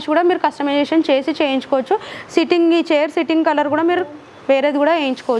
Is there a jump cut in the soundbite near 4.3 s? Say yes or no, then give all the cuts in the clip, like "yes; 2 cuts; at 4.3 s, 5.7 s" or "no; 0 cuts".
no; 0 cuts